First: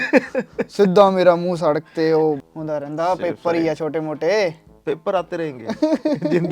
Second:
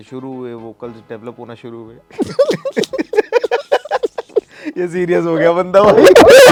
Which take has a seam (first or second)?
first